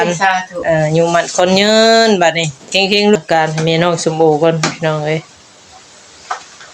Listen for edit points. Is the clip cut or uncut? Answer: cut